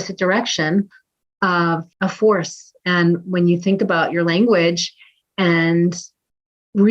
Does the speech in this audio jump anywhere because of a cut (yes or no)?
yes